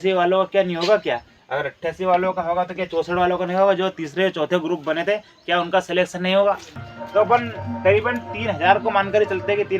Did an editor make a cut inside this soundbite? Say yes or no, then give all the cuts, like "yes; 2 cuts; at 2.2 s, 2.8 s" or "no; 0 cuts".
yes; 1 cut; at 6.9 s